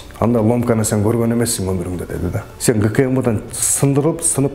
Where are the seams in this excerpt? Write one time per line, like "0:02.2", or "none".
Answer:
0:02.5